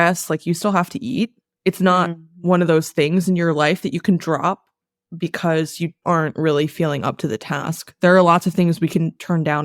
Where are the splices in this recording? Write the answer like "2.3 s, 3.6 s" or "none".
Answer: none